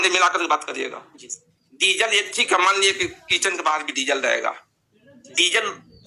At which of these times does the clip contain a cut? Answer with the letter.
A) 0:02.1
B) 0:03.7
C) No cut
C